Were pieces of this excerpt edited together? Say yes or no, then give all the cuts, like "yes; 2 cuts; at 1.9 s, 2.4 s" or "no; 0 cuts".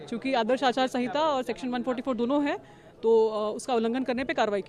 no; 0 cuts